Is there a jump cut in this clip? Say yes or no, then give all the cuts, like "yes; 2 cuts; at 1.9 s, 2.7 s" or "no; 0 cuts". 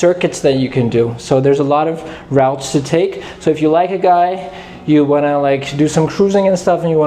no; 0 cuts